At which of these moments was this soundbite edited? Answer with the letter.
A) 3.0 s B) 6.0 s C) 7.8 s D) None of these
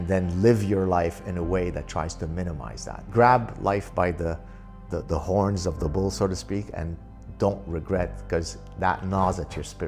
A